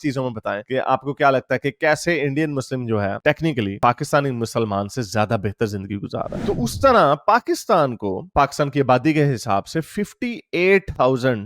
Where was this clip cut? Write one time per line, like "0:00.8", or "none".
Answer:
0:06.3